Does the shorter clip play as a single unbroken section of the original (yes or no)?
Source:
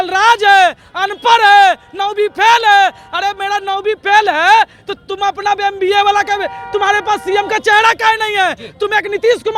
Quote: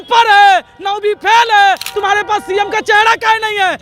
no